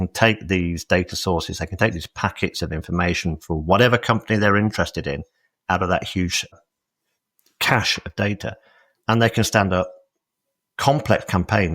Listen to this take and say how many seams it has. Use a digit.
1